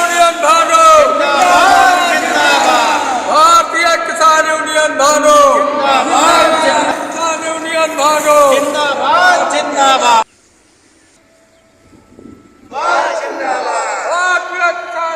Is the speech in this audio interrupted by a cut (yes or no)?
yes